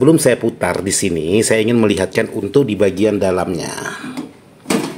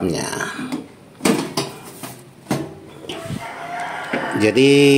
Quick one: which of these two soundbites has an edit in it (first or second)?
second